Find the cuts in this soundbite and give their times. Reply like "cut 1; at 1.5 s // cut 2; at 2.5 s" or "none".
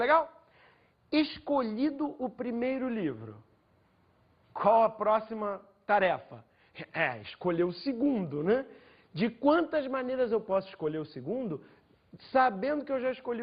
cut 1; at 1.0 s